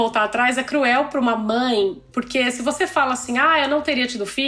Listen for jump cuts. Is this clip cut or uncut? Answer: uncut